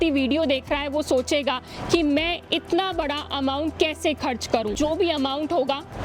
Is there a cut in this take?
yes; 1 cut; at 4.7 s

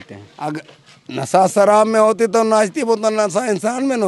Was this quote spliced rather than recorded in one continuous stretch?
no; 0 cuts

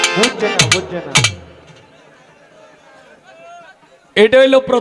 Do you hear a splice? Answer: no; 0 cuts

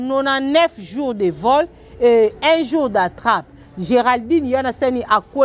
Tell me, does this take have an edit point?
no; 0 cuts

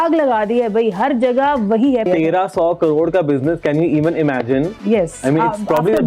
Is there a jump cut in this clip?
yes; 1 cut; at 2.0 s

